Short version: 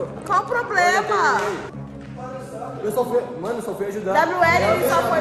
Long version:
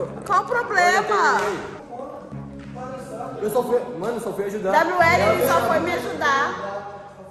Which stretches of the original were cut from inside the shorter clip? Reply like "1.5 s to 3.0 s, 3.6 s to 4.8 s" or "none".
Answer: 1.8 s to 2.4 s